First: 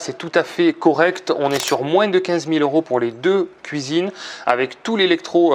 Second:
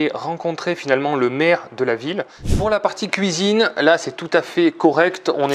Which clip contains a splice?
second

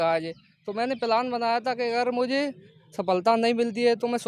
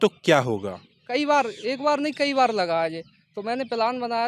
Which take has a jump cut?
second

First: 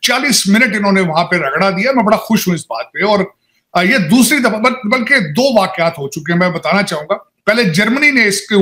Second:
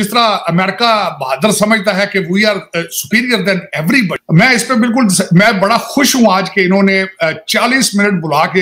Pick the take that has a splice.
second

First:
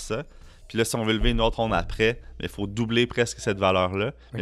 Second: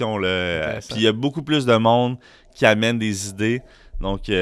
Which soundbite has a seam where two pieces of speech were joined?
first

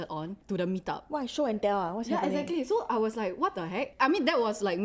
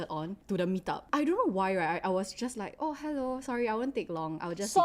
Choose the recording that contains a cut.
second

